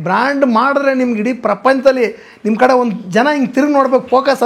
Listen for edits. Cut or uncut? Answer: uncut